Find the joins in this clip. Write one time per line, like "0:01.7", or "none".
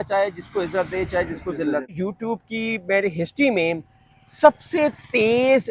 0:01.9